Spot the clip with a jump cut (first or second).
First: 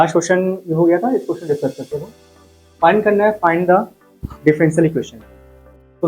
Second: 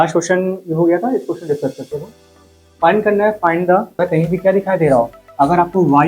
second